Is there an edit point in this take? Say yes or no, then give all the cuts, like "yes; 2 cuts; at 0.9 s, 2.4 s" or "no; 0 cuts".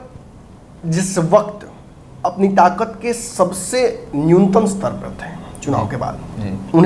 no; 0 cuts